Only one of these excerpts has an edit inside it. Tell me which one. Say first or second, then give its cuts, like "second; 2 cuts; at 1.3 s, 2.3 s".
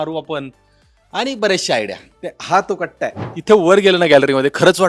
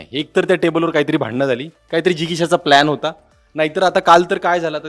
first; 1 cut; at 3.3 s